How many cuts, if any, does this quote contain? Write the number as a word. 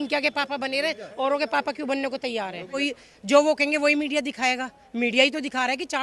one